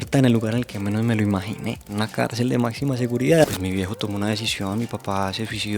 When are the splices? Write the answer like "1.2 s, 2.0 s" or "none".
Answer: 1.8 s, 3.4 s